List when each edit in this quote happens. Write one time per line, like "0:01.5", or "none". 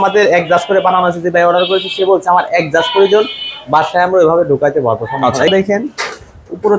0:05.5